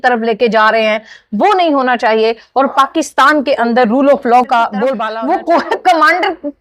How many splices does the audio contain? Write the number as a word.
one